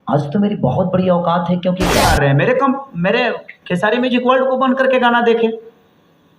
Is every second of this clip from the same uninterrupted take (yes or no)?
no